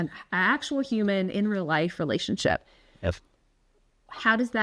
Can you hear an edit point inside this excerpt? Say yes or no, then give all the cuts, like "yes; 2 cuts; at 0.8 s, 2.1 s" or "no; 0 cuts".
no; 0 cuts